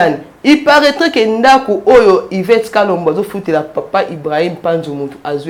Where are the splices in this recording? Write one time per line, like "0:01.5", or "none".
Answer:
none